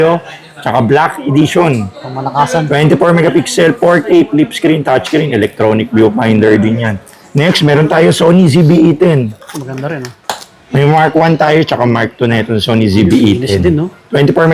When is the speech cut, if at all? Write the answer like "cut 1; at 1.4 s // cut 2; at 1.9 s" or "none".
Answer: cut 1; at 7.3 s